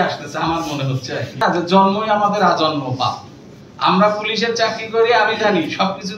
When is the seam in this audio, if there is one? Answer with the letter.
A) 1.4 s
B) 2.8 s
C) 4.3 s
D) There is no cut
A